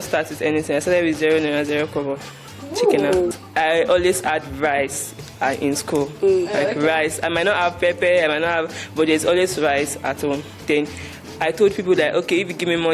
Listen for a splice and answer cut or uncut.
cut